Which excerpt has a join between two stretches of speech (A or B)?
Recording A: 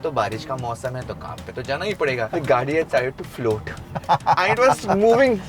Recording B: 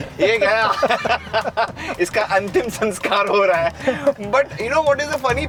A